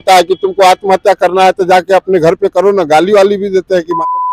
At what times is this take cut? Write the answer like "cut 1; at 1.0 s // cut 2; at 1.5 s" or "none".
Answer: none